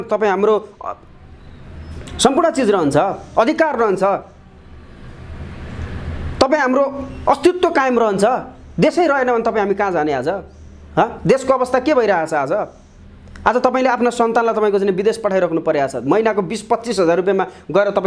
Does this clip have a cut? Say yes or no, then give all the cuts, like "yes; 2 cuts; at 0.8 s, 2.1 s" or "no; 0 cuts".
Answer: no; 0 cuts